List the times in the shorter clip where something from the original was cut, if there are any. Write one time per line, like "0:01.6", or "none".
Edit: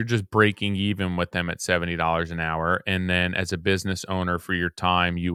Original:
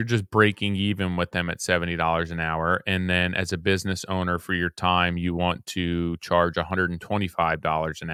none